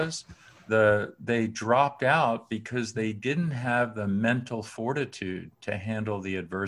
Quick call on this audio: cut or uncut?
uncut